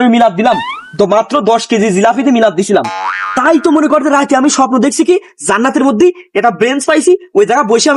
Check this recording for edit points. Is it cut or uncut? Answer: uncut